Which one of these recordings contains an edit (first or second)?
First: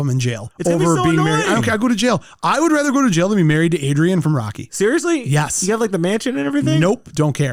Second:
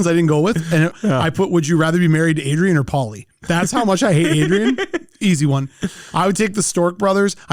second